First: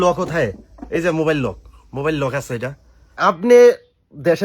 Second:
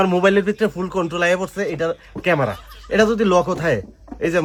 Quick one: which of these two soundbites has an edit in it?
first; 1 cut; at 3.1 s

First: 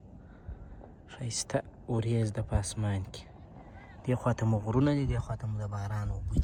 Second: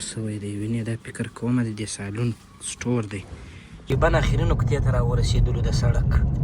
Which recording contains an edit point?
second; 1 cut; at 3.9 s

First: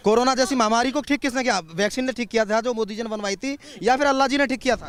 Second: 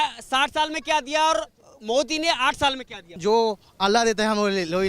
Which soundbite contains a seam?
second; 1 cut; at 3.1 s

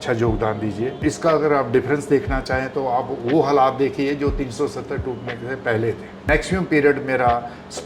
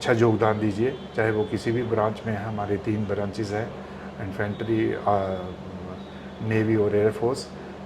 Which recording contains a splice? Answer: first; 2 cuts; at 1.0 s, 6.2 s

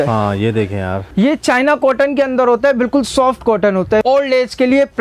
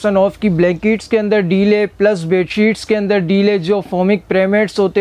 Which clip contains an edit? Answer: first; 2 cuts; at 1.0 s, 4.0 s

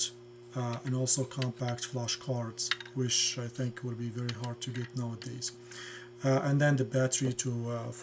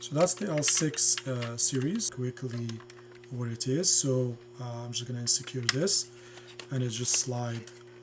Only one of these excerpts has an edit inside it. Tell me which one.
second; 1 cut; at 2.1 s

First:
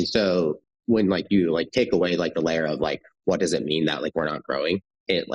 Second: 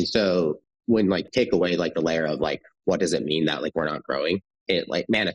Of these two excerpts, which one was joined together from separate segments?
second; 1 cut; at 1.3 s

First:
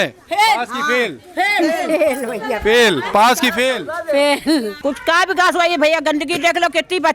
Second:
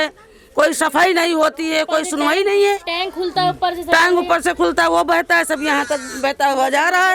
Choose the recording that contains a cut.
first; 1 cut; at 4.7 s

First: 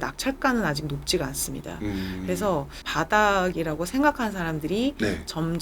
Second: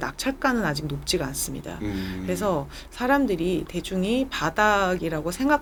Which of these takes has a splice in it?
first; 1 cut; at 2.9 s

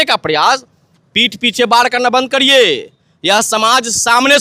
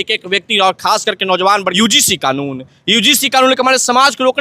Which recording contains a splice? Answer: second; 1 cut; at 1.7 s

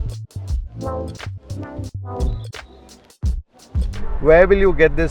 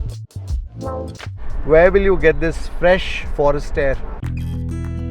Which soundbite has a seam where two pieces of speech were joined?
second; 2 cuts; at 1.5 s, 4.1 s

